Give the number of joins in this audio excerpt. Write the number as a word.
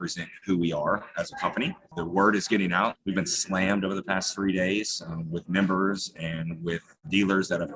two